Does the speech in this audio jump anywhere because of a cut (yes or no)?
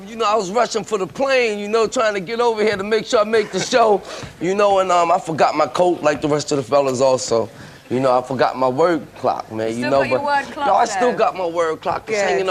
no